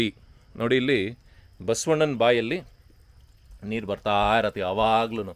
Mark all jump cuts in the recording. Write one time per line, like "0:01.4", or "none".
none